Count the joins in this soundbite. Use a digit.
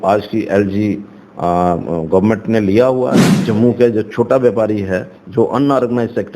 1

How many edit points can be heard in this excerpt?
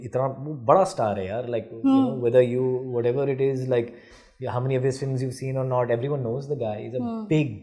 0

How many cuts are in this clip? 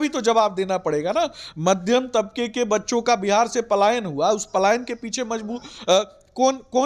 0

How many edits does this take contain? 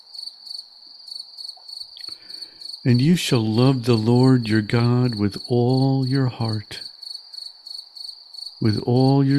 2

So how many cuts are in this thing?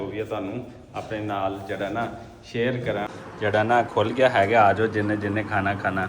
1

